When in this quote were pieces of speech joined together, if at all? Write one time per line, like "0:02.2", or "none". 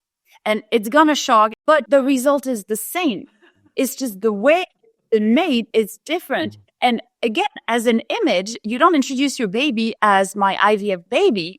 0:01.7